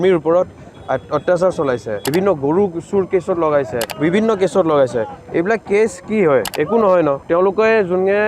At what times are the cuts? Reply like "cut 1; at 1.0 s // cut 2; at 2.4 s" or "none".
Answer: cut 1; at 1.9 s // cut 2; at 3.8 s // cut 3; at 6.5 s // cut 4; at 7.2 s